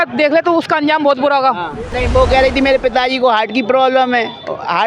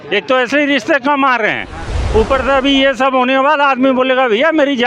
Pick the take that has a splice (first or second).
first